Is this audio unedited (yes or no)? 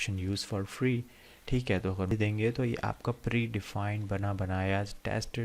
no